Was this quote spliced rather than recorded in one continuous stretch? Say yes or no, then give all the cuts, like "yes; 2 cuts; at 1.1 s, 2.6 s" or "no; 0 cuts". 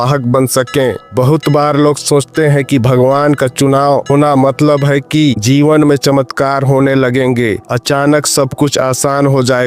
yes; 2 cuts; at 4.1 s, 5.4 s